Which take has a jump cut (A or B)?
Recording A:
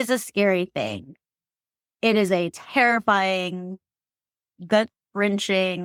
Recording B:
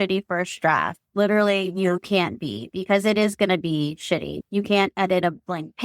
B